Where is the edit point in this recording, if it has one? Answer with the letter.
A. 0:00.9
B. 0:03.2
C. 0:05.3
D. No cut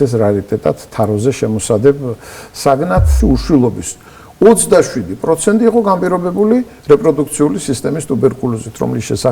B